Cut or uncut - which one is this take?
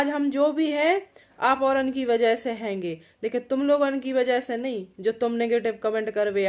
uncut